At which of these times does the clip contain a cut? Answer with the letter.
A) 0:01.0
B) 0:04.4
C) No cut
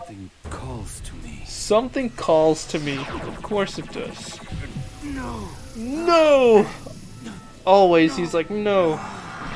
B